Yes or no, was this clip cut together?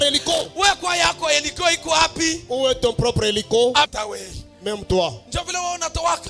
yes